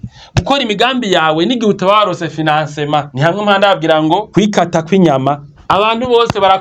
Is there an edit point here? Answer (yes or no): yes